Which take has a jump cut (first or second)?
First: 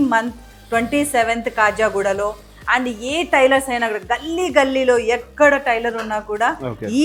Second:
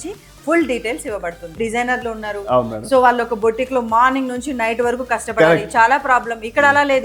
second